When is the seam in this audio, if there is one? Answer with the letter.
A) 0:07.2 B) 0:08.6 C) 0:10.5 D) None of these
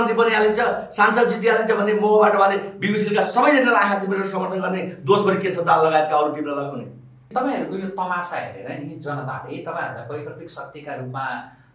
A